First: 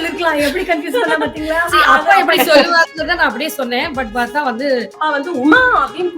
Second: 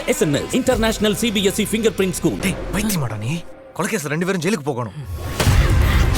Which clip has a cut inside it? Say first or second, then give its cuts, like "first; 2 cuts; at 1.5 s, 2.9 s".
first; 1 cut; at 4.9 s